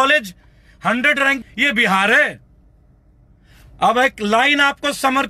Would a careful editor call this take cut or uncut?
cut